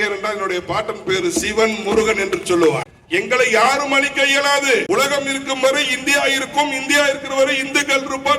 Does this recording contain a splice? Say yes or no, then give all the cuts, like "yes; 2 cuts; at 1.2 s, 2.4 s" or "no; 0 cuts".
yes; 1 cut; at 2.9 s